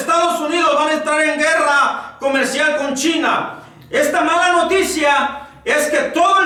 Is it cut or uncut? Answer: uncut